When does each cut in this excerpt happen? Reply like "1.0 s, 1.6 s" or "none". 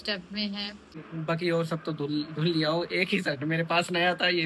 1.1 s